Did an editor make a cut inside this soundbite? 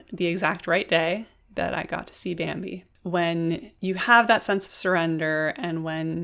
yes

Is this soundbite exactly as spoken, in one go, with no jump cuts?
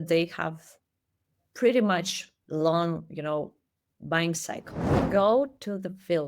no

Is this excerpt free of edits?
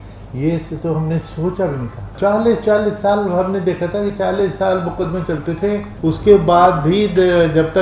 no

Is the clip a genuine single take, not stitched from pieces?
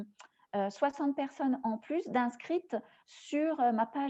yes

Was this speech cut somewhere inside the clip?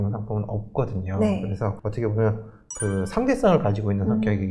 no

